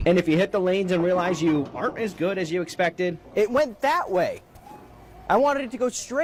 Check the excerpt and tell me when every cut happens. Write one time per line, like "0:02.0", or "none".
none